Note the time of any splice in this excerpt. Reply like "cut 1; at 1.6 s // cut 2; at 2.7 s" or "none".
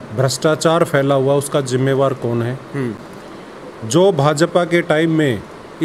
none